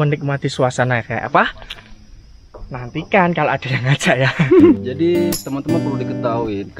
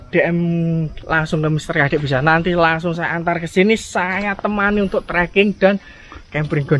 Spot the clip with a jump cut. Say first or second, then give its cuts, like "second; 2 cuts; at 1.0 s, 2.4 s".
first; 1 cut; at 4.8 s